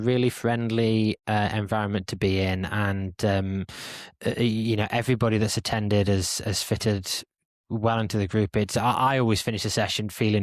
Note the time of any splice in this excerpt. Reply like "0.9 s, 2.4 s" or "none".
none